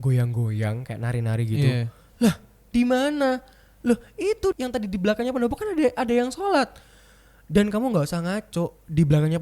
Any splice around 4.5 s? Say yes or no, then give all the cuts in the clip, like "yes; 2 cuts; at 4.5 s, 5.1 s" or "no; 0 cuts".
yes; 1 cut; at 4.5 s